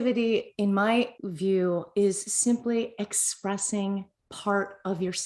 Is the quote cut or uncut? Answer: cut